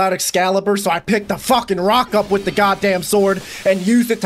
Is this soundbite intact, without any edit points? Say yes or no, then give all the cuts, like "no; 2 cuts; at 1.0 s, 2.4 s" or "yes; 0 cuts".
yes; 0 cuts